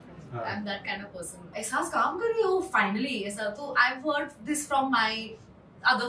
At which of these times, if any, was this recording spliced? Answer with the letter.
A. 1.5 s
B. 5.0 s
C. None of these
A